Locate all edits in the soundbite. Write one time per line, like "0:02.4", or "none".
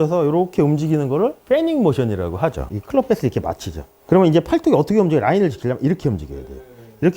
0:02.7